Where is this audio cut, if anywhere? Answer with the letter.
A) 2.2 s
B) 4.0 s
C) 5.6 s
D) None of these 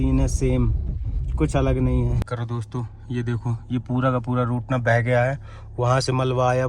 A